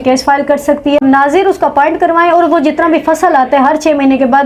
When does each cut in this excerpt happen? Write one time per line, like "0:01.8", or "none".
0:01.0

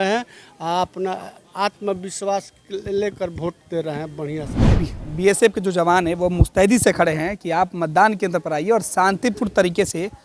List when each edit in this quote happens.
0:04.6

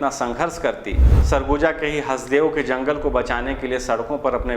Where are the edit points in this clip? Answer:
0:01.1

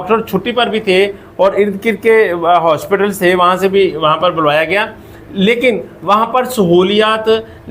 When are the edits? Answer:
none

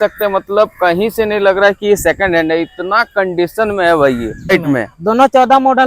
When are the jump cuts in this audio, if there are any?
0:04.5

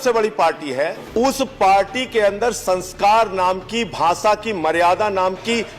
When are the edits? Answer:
0:01.0

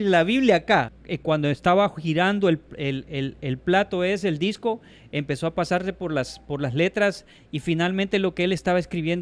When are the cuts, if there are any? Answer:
0:01.0

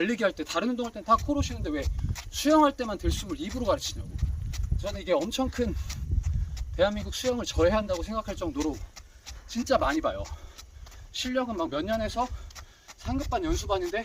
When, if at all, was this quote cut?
none

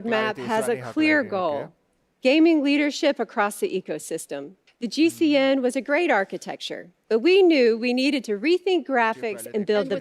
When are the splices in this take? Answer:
0:04.9

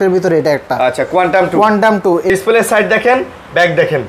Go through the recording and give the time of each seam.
0:02.3

